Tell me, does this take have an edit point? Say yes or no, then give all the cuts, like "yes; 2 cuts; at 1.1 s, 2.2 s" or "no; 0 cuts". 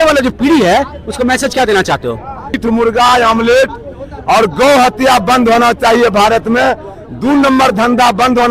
yes; 1 cut; at 2.6 s